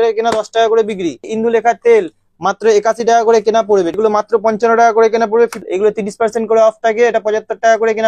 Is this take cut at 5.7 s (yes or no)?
yes